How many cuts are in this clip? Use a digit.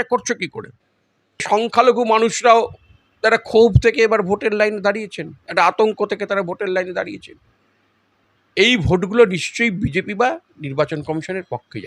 1